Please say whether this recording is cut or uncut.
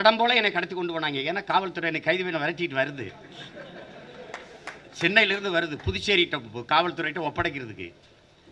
uncut